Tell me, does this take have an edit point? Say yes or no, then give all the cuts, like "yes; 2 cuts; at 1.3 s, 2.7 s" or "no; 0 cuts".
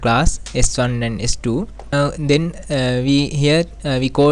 yes; 1 cut; at 1.9 s